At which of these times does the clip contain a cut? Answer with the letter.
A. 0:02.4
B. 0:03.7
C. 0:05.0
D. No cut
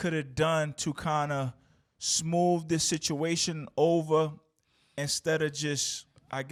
D